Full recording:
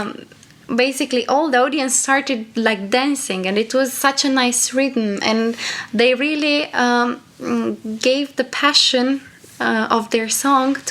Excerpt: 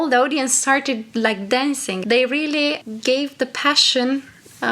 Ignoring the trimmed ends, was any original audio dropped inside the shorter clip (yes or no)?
yes